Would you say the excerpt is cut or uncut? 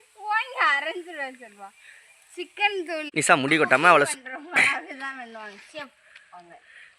cut